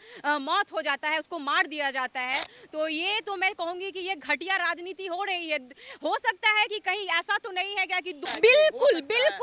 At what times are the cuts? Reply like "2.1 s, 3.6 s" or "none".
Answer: 8.2 s